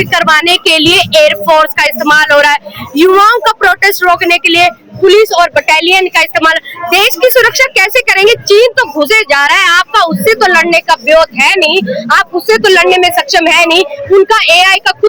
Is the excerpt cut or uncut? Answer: uncut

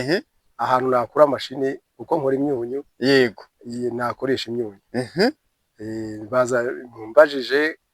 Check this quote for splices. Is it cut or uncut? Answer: uncut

